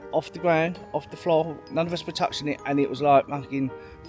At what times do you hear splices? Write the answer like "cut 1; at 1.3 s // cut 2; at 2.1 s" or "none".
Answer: none